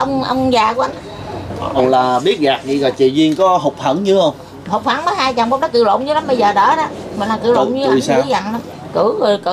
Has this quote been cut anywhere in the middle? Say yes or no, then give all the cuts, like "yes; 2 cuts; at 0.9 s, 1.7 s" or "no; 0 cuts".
yes; 1 cut; at 1.8 s